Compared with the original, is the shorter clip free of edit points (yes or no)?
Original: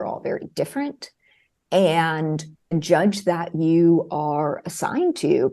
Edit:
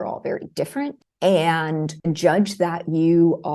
no